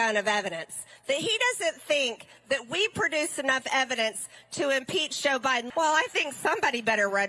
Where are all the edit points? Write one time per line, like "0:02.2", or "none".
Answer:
0:05.7